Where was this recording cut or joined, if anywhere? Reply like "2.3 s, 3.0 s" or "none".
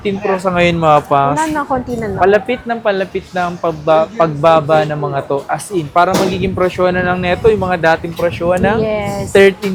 none